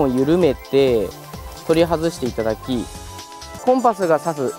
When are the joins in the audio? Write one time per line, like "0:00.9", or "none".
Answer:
0:03.4